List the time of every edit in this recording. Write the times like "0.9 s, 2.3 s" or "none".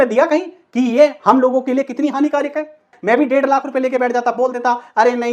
2.9 s